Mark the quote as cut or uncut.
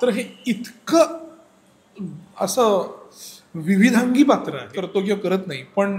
cut